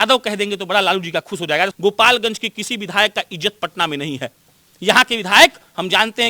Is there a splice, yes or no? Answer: yes